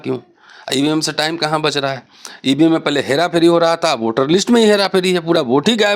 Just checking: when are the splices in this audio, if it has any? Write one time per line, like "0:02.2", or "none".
none